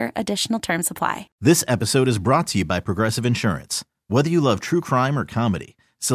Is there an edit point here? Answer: yes; 1 cut; at 1.3 s

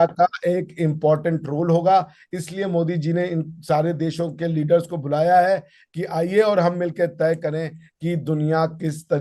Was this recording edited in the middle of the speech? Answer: no; 0 cuts

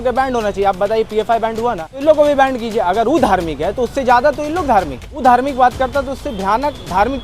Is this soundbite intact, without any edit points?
no; 2 cuts; at 2.0 s, 5.0 s

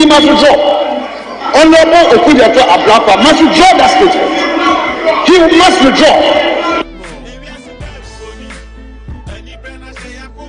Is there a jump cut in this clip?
no; 0 cuts

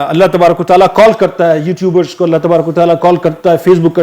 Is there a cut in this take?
no; 0 cuts

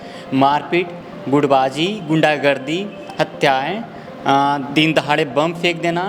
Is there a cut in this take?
no; 0 cuts

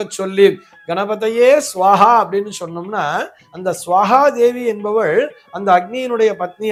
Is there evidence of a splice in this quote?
no; 0 cuts

